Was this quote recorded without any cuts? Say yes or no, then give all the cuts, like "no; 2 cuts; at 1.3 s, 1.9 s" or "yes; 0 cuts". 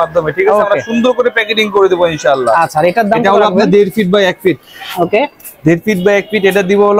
yes; 0 cuts